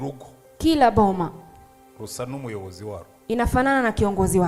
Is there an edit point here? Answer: no; 0 cuts

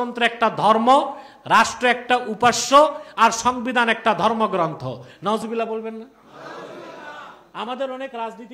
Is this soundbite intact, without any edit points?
yes; 0 cuts

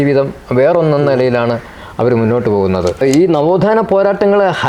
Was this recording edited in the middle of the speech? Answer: yes; 1 cut; at 3.0 s

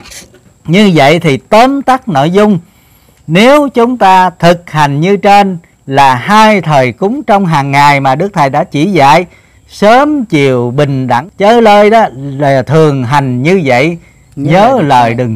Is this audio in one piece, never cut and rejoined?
no; 1 cut; at 11.3 s

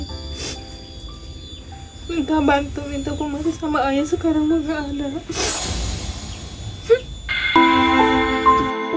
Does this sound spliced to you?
yes; 1 cut; at 7.6 s

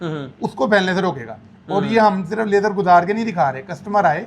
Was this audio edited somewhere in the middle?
no; 0 cuts

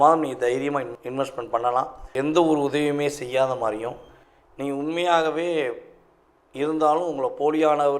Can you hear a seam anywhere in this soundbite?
yes; 1 cut; at 2.0 s

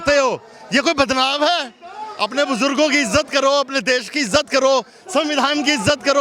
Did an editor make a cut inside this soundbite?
no; 0 cuts

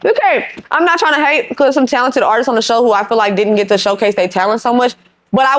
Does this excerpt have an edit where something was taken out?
no; 0 cuts

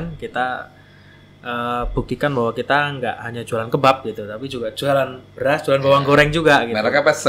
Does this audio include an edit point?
no; 0 cuts

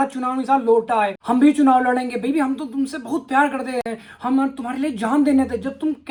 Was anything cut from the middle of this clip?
no; 0 cuts

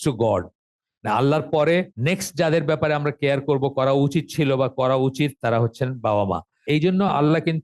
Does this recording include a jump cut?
yes; 2 cuts; at 1.9 s, 6.5 s

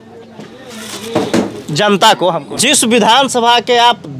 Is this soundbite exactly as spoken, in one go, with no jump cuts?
no; 1 cut; at 2.6 s

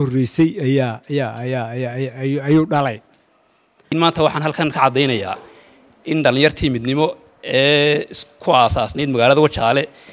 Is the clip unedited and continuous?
no; 1 cut; at 3.8 s

